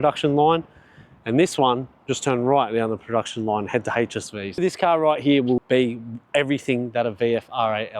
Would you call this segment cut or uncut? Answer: cut